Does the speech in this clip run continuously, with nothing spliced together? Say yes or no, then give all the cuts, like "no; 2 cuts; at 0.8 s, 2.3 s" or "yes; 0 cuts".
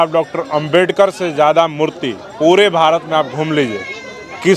yes; 0 cuts